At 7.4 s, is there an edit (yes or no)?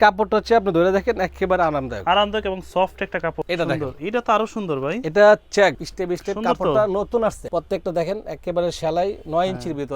yes